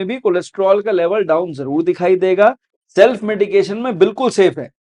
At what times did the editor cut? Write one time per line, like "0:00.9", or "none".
none